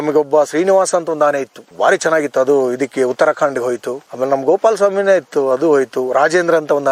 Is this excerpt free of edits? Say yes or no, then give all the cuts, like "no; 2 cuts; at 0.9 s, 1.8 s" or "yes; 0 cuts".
yes; 0 cuts